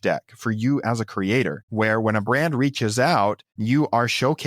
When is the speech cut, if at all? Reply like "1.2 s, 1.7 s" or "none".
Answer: 1.6 s, 3.5 s